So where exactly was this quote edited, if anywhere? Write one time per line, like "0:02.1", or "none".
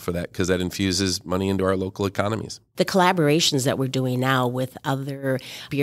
0:02.6